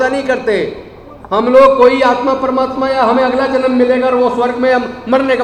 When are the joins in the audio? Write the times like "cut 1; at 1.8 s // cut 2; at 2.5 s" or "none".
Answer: none